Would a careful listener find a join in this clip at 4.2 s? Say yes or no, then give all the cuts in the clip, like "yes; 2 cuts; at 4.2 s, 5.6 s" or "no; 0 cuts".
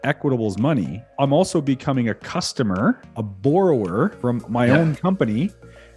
yes; 2 cuts; at 1.1 s, 4.2 s